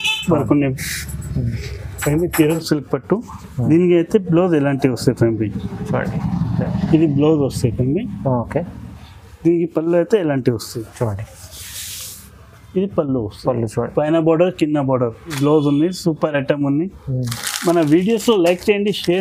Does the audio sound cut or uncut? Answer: cut